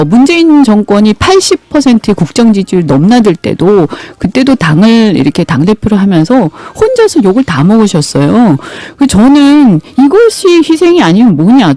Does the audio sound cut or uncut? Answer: uncut